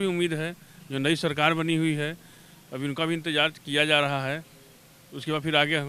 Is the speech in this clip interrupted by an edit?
no; 0 cuts

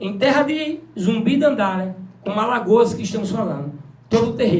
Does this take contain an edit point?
no; 0 cuts

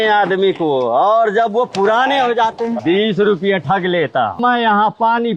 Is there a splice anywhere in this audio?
yes; 2 cuts; at 2.8 s, 4.4 s

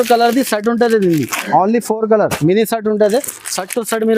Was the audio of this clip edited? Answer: no; 0 cuts

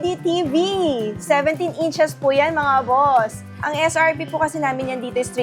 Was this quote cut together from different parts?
yes; 1 cut; at 3.6 s

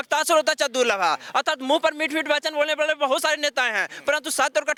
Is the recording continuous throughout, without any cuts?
yes; 0 cuts

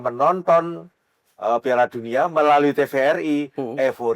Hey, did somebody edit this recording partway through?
no; 0 cuts

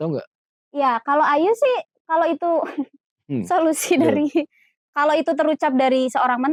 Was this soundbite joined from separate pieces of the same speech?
no; 0 cuts

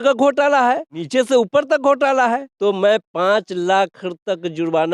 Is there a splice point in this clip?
yes; 2 cuts; at 1.0 s, 2.5 s

